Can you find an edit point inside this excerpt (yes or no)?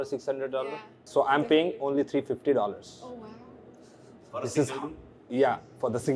no